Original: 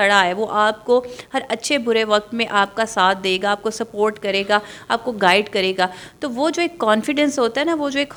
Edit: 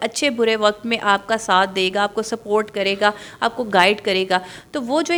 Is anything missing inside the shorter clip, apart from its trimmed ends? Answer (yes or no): no